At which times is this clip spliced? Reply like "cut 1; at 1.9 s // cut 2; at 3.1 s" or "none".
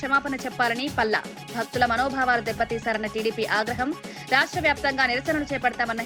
none